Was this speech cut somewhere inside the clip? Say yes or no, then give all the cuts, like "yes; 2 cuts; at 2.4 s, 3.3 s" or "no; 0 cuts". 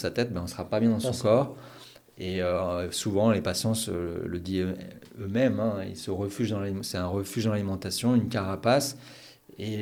no; 0 cuts